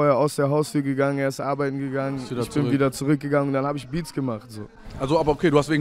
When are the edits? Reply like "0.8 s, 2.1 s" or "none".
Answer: none